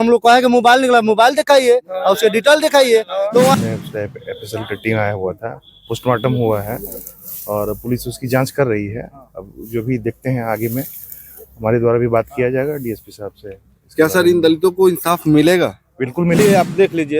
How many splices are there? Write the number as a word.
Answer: two